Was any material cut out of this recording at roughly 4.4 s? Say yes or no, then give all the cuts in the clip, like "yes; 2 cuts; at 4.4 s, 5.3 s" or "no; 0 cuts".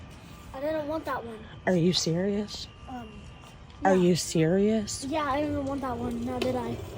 no; 1 cut; at 2.0 s